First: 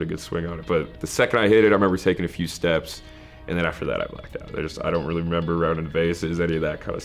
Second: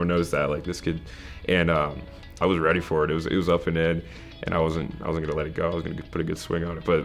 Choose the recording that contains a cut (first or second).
second